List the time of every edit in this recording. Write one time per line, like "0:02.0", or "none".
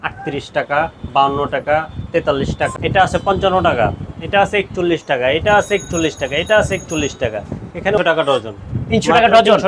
0:02.6
0:08.0